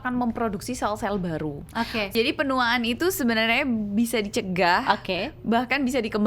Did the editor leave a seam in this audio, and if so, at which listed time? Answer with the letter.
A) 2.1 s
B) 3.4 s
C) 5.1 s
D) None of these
A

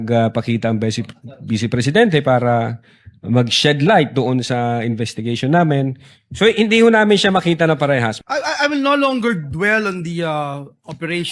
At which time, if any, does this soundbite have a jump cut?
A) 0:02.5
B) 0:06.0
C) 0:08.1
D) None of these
C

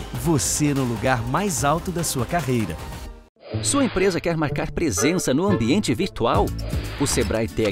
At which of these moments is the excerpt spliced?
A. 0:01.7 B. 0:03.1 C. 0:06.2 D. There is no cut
B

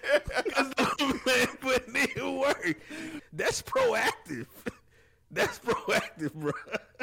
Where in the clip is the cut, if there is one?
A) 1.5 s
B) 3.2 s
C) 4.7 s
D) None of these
B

